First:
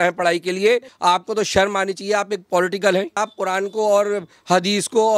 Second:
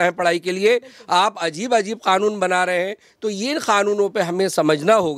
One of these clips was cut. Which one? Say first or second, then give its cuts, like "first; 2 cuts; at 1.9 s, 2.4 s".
first; 2 cuts; at 0.9 s, 3.2 s